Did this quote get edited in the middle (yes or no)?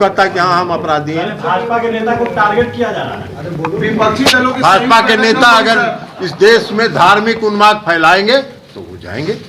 no